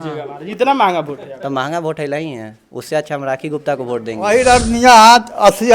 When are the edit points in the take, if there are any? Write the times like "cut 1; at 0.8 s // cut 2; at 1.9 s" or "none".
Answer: cut 1; at 4.1 s

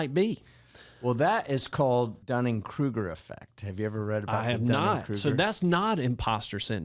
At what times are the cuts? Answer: cut 1; at 2.2 s

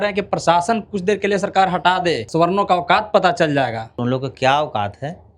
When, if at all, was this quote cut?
cut 1; at 2.3 s // cut 2; at 4.0 s

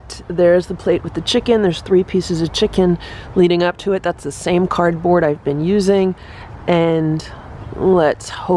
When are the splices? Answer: none

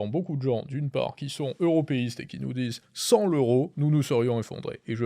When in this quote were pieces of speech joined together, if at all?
none

